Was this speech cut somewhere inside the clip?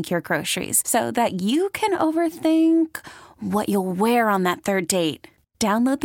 no; 0 cuts

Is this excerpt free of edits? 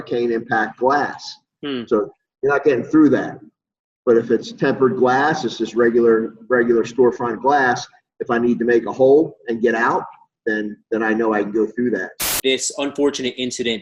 no; 1 cut; at 12.2 s

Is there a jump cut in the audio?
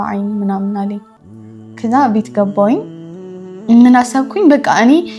no; 0 cuts

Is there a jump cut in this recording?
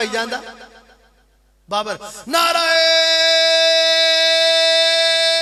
no; 0 cuts

